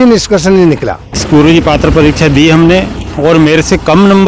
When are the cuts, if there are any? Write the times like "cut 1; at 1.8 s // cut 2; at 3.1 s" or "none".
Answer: cut 1; at 1.2 s